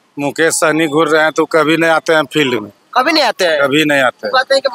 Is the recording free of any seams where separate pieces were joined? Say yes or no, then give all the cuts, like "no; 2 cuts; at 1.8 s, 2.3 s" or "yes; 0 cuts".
yes; 0 cuts